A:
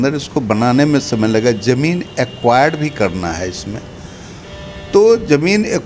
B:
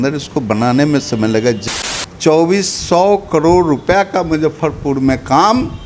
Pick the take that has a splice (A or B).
B